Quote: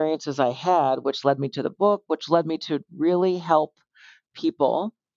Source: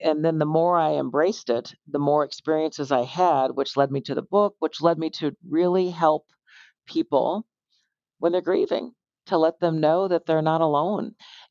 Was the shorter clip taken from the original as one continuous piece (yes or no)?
yes